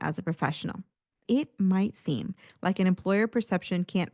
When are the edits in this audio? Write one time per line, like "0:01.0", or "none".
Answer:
0:01.2

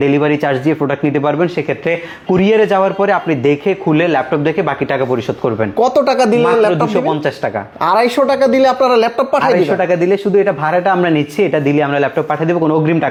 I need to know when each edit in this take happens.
none

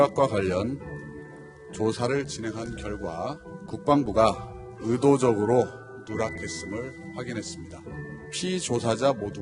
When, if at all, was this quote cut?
none

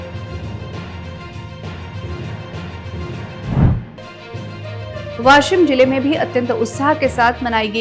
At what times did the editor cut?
none

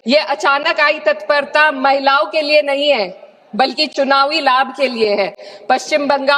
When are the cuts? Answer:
none

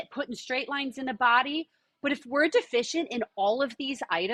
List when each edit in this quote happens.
none

